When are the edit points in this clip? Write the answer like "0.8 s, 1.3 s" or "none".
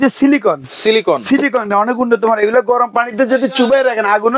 none